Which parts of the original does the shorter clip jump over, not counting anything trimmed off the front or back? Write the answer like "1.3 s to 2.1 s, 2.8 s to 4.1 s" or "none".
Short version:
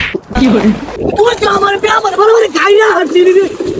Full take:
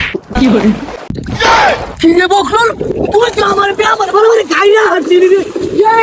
0.9 s to 2.9 s